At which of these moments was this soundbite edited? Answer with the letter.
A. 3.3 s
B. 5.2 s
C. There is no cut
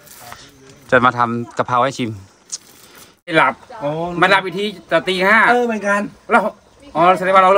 A